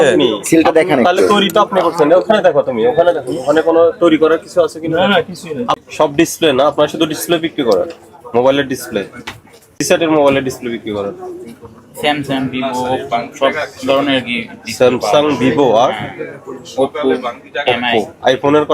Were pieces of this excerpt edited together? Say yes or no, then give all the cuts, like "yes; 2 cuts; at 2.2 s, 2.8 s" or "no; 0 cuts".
yes; 2 cuts; at 5.8 s, 9.8 s